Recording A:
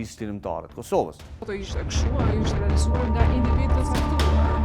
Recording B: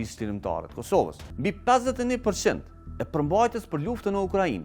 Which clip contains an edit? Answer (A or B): B